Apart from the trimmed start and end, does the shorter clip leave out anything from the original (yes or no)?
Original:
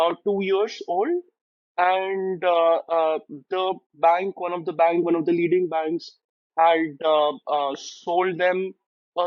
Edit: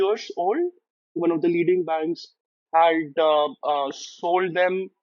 yes